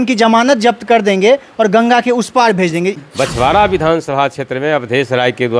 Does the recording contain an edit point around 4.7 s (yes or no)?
no